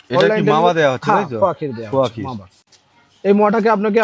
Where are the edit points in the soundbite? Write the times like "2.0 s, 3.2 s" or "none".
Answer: none